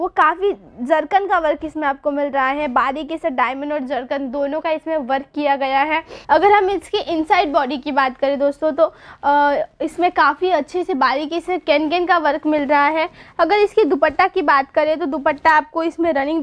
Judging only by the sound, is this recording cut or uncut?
cut